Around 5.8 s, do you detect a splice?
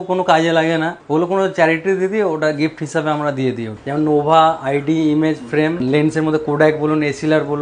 yes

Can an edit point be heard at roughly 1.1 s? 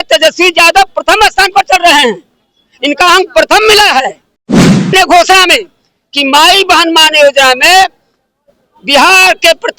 no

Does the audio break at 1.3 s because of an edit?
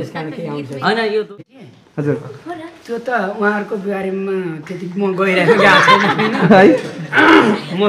yes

